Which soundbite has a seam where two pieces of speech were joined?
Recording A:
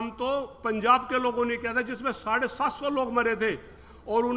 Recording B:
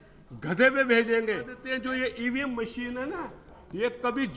B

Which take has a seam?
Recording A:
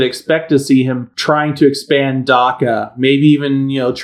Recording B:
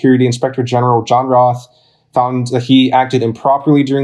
A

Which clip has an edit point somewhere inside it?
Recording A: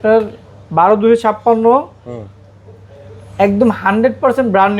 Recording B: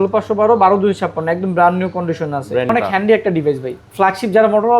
B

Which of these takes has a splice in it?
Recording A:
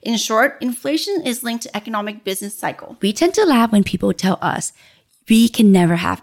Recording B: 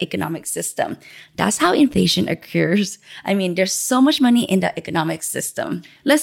A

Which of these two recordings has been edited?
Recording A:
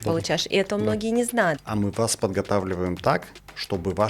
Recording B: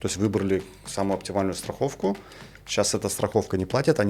A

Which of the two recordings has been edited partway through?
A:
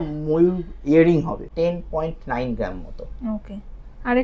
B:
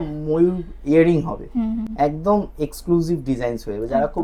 A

